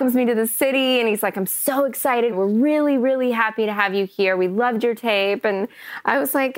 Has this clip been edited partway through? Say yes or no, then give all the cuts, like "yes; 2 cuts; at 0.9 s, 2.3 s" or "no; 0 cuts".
yes; 1 cut; at 2.3 s